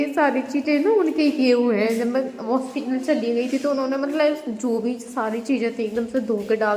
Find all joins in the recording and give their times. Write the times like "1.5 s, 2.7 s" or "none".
none

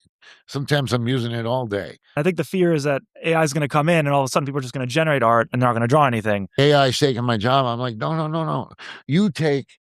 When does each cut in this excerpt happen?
2.0 s, 6.5 s

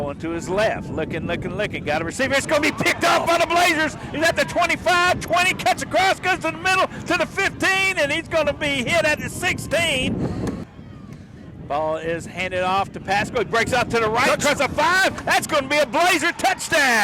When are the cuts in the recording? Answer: 10.7 s

